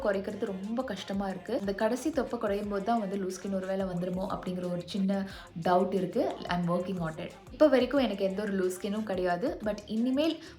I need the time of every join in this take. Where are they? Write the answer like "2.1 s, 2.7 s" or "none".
1.6 s, 7.4 s